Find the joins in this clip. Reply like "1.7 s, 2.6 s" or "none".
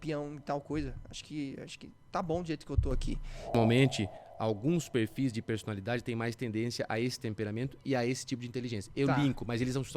3.5 s